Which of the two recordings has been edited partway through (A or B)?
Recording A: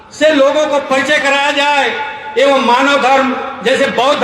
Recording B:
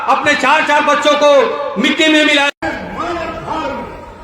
B